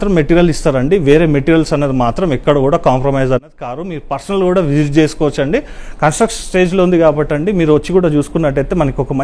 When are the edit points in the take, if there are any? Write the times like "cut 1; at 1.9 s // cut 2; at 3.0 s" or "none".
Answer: none